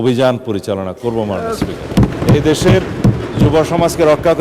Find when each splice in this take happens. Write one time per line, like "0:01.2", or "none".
0:02.2